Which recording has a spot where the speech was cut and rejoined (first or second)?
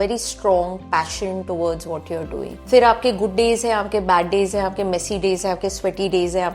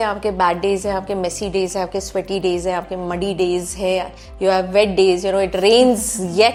first